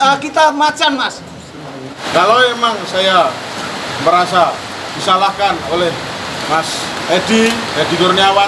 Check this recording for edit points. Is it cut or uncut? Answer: cut